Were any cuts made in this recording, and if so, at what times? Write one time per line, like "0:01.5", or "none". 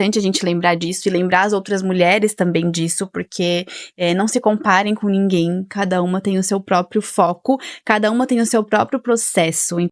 none